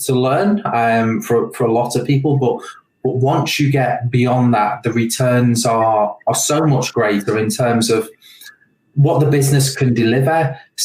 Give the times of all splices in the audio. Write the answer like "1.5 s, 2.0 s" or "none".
none